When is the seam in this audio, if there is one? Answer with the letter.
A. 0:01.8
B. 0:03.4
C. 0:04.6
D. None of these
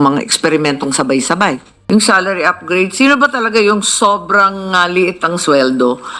A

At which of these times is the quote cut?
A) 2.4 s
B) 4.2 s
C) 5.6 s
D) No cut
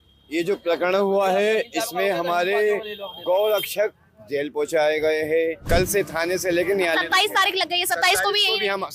C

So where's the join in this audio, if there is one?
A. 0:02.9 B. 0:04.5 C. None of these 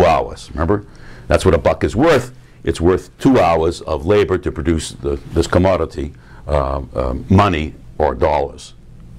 A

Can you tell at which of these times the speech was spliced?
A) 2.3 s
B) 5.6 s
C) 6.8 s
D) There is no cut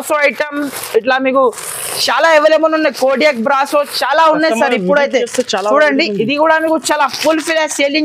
D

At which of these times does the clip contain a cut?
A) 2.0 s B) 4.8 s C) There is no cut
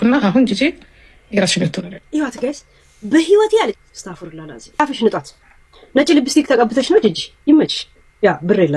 B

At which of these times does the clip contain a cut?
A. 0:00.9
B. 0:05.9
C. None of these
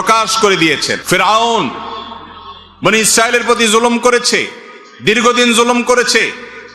A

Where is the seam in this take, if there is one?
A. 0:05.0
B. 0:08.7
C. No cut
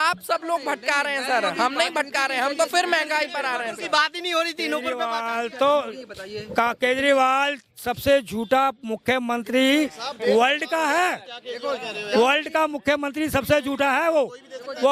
A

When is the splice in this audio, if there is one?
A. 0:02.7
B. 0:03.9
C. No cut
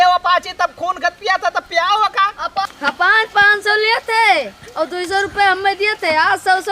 A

